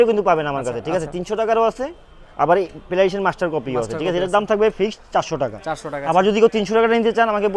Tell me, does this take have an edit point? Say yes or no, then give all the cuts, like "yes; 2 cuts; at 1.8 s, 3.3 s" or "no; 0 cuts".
no; 0 cuts